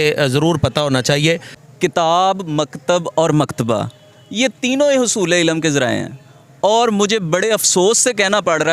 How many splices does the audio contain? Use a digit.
1